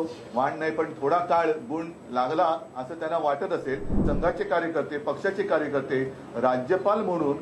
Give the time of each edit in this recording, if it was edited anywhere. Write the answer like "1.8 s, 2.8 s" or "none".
4.0 s